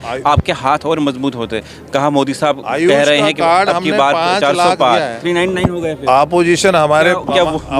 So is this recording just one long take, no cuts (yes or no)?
no